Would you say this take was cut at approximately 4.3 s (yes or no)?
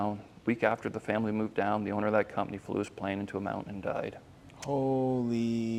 no